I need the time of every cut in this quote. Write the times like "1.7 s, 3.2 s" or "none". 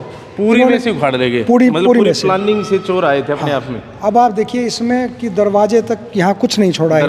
none